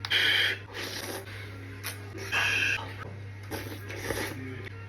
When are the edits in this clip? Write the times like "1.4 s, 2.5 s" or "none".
1.0 s, 2.3 s